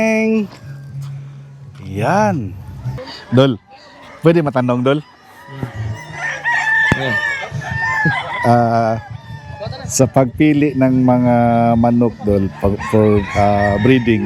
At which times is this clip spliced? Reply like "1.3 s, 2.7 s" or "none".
3.2 s